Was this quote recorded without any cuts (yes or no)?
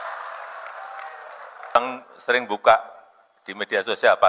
no